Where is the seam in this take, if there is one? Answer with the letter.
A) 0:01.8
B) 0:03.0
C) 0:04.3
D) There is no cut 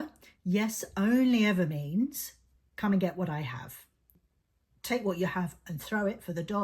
C